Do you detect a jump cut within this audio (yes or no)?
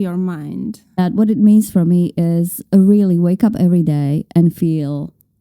yes